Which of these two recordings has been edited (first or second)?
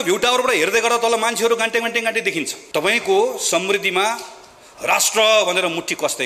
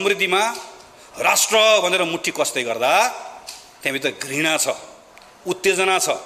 first